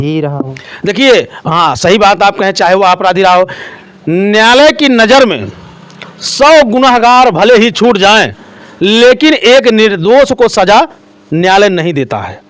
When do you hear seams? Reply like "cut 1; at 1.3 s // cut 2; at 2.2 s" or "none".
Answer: none